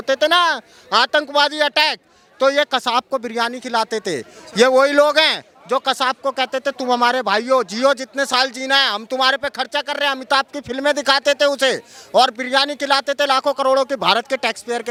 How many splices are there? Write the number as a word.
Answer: zero